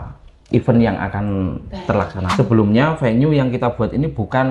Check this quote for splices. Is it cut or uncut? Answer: cut